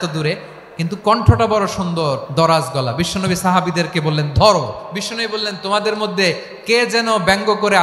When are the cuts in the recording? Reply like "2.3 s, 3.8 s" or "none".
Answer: 2.2 s, 4.9 s